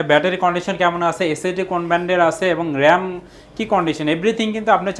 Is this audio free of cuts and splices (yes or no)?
yes